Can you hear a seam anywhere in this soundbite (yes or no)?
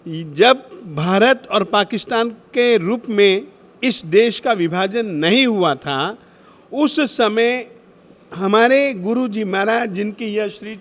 no